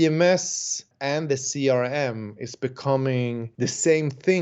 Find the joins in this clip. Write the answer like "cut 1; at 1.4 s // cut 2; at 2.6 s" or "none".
cut 1; at 0.9 s // cut 2; at 3.5 s